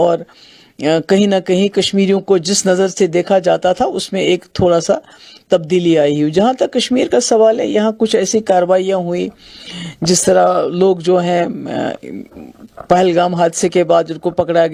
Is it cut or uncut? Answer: uncut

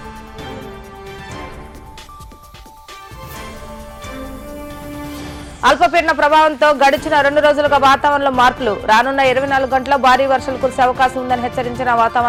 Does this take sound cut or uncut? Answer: uncut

